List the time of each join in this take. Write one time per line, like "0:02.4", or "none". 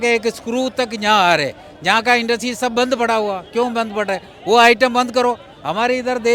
none